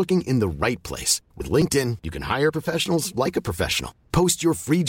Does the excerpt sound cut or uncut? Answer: uncut